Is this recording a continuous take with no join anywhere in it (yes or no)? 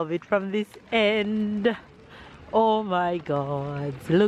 yes